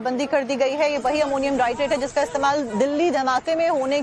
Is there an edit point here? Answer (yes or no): yes